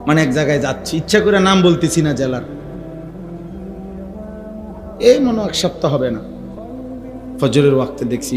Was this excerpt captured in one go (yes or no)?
no